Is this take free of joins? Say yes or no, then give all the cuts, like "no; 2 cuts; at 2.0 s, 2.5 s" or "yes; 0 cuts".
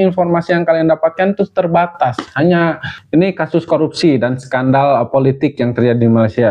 no; 1 cut; at 3.0 s